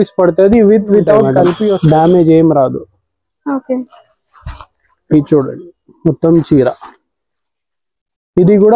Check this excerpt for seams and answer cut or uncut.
cut